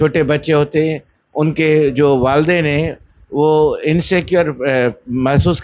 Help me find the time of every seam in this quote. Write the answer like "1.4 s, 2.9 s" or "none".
none